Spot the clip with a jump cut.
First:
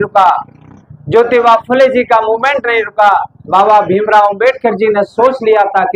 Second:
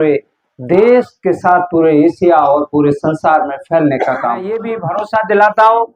second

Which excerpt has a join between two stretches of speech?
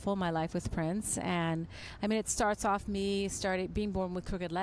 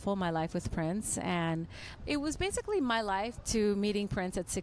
second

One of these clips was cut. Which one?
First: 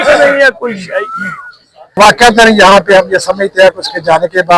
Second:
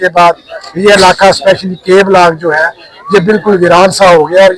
first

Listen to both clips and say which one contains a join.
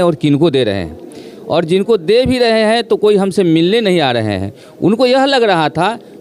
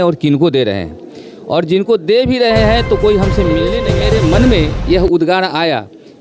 second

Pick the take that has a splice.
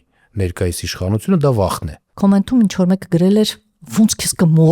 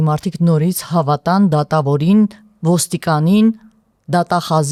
first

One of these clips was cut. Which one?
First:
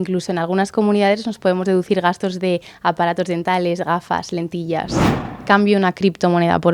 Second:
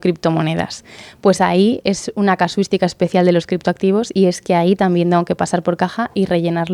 first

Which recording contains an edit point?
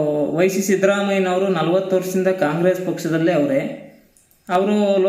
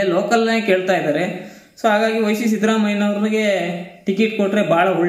first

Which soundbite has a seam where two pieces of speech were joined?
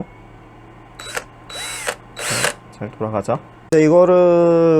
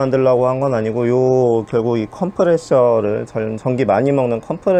first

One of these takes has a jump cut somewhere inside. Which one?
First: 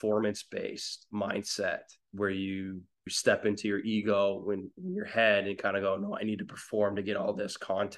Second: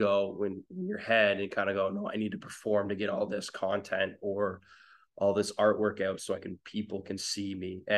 first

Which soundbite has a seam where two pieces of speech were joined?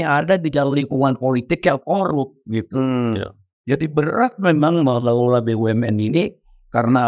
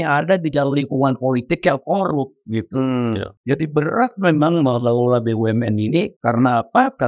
second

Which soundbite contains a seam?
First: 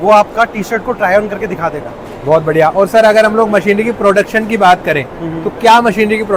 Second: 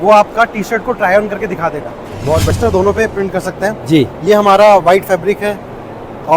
second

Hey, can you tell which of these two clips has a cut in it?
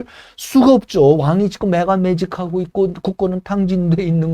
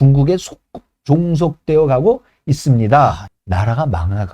second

